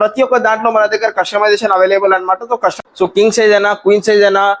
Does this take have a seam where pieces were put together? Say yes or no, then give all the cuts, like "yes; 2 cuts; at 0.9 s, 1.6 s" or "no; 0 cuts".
yes; 1 cut; at 2.8 s